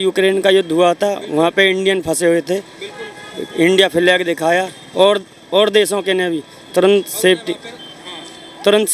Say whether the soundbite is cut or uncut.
uncut